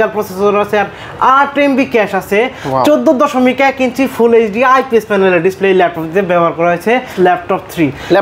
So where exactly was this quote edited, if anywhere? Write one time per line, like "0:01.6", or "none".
0:07.1